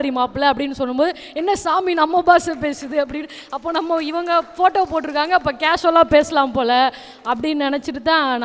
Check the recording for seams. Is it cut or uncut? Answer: uncut